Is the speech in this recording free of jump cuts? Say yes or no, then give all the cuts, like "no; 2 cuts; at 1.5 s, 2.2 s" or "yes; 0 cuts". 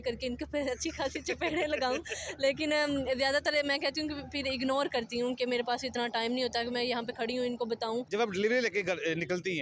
no; 1 cut; at 8.1 s